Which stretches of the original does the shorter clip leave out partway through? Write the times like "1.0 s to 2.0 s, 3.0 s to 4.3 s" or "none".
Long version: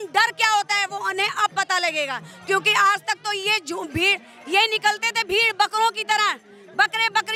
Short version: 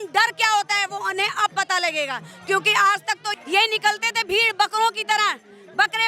3.3 s to 4.3 s